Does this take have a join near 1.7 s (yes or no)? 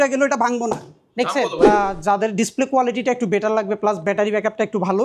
yes